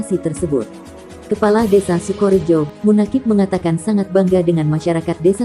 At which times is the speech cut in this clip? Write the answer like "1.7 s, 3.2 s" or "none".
2.7 s